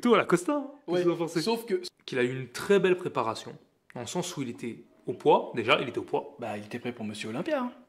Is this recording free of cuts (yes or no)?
no